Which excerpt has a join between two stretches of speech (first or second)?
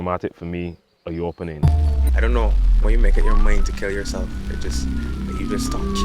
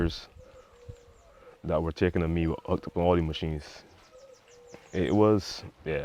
first